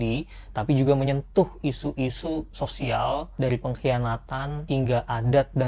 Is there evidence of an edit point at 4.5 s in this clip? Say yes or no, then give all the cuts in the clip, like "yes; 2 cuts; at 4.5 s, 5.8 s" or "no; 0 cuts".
yes; 2 cuts; at 3.3 s, 4.5 s